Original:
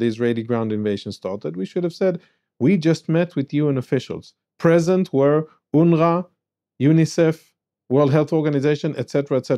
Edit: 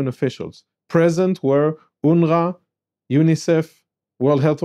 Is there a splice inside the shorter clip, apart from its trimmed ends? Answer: no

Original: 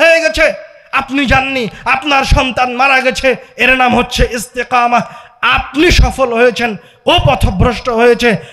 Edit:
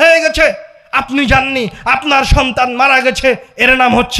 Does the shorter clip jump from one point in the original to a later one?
no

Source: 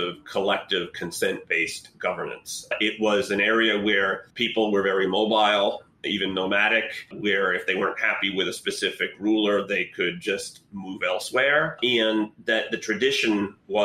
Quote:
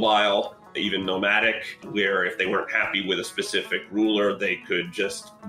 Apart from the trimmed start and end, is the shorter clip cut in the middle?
no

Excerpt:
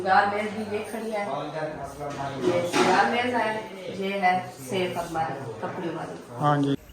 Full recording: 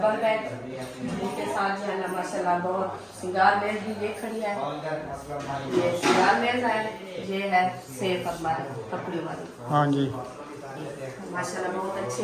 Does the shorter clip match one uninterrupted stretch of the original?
yes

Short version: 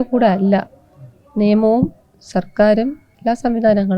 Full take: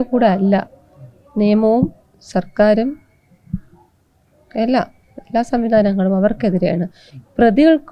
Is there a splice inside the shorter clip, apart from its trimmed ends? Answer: yes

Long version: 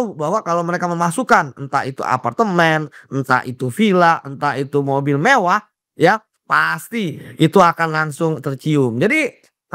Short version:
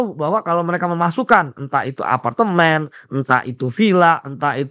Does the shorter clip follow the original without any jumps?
yes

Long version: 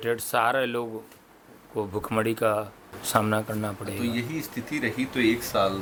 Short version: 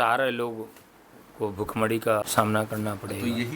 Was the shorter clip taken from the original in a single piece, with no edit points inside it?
no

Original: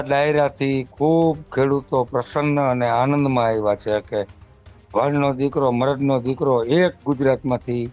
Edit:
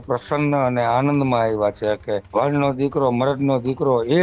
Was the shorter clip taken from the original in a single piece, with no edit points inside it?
no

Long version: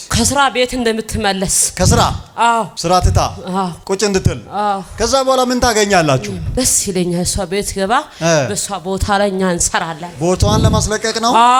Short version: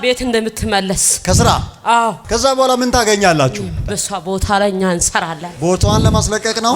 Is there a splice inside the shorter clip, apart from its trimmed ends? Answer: yes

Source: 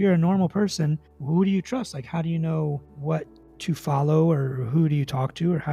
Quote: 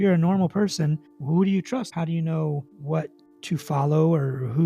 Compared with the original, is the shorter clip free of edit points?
no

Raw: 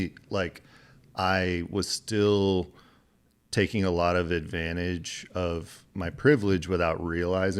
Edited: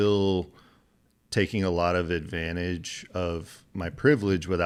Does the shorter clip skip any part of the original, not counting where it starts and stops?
no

